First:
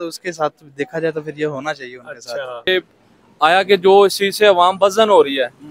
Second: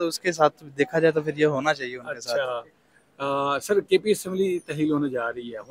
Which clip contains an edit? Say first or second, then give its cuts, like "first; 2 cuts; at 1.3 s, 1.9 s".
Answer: first; 1 cut; at 2.7 s